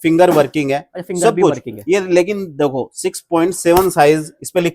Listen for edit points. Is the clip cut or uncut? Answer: uncut